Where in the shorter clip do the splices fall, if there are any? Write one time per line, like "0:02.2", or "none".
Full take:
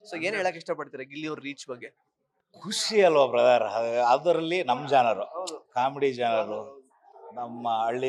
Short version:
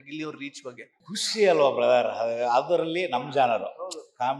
0:00.9